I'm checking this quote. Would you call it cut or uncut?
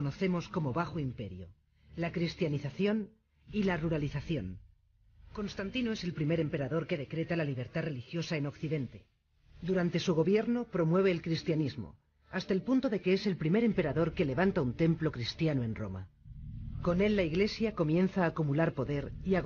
cut